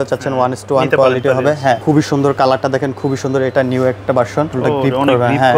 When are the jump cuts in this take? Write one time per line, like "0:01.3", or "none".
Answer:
0:01.8
0:04.5